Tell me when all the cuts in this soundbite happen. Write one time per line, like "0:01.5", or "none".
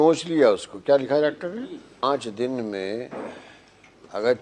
0:02.0